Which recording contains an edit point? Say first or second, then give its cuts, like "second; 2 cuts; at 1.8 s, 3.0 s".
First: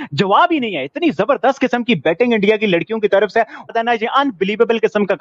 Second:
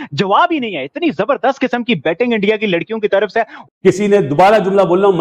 second; 1 cut; at 3.7 s